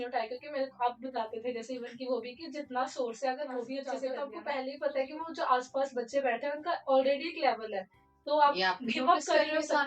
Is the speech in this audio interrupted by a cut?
yes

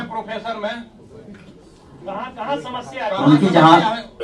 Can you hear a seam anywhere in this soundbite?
no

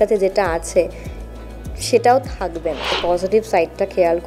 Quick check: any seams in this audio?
yes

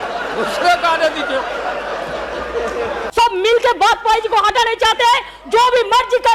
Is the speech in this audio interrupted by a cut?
yes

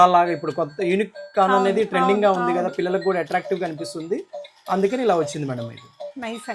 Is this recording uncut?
yes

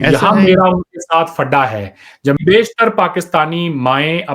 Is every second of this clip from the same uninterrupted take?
no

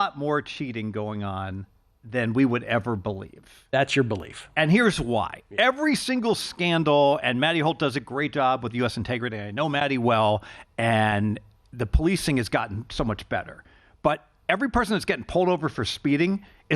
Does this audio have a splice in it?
no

